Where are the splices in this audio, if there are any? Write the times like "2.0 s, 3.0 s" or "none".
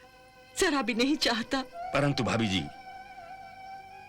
1.8 s